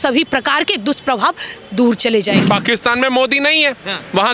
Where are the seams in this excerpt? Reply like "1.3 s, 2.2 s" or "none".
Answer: 2.4 s